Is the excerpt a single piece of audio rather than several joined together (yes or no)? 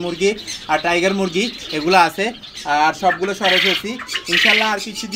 yes